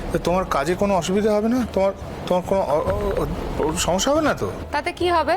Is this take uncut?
yes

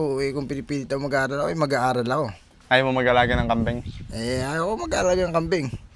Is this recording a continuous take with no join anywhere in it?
yes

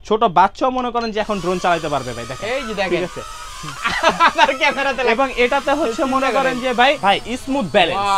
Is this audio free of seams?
no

